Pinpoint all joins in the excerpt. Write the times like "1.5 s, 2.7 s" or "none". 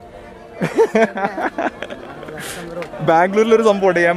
3.0 s